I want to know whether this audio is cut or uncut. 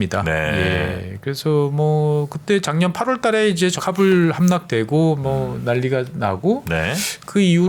uncut